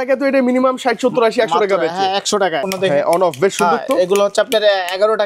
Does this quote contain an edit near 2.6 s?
yes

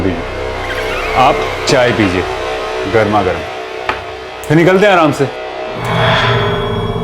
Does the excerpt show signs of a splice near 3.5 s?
no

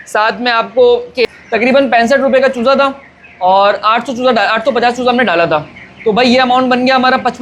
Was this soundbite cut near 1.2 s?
yes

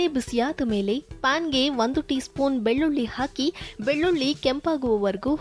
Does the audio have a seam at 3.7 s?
no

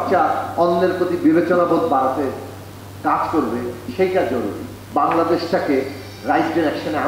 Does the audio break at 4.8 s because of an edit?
yes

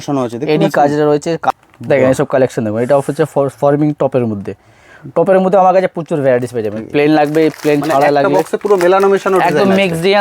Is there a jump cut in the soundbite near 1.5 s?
yes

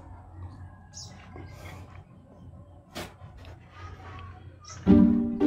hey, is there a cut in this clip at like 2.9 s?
no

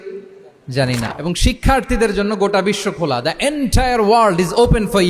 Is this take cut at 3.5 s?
no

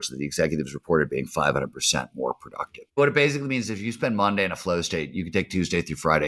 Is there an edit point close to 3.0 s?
yes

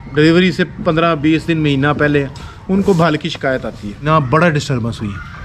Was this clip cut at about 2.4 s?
no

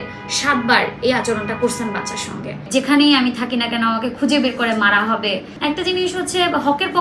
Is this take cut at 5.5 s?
yes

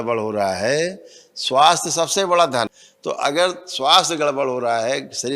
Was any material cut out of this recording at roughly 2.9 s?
yes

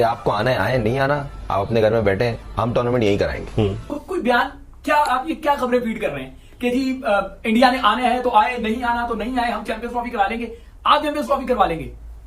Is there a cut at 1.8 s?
no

